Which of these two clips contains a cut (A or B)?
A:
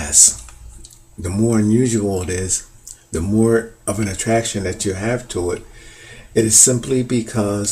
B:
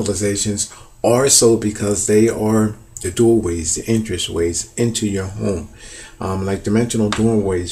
B